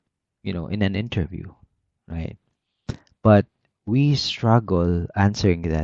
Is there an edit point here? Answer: no; 0 cuts

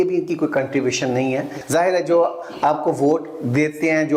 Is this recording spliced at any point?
yes; 1 cut; at 1.5 s

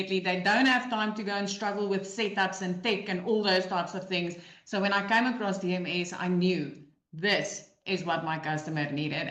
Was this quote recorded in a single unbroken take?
yes; 0 cuts

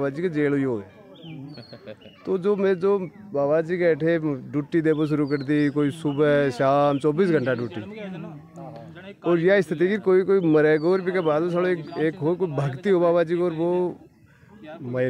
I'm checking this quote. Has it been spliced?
no; 0 cuts

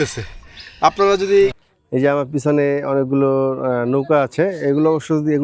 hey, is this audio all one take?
no; 1 cut; at 1.6 s

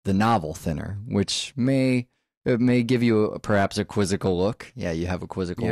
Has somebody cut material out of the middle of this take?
no; 0 cuts

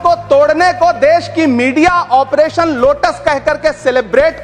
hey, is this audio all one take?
yes; 0 cuts

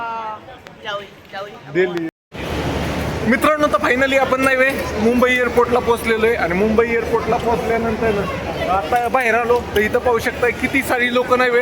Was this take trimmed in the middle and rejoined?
yes; 1 cut; at 2.1 s

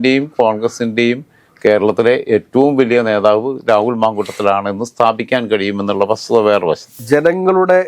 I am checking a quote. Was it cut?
yes; 1 cut; at 6.9 s

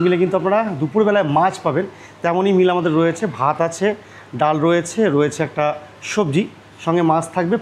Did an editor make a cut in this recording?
no; 0 cuts

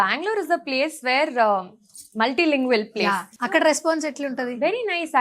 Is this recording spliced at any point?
yes; 1 cut; at 3.3 s

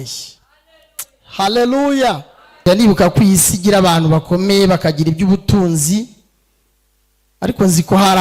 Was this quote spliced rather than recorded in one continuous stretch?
yes; 1 cut; at 2.6 s

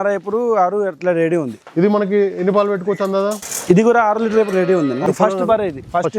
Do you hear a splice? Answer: yes; 3 cuts; at 1.6 s, 3.5 s, 5.0 s

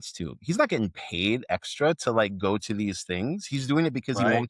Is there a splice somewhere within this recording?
no; 0 cuts

